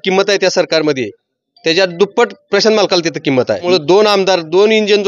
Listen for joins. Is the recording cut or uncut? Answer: cut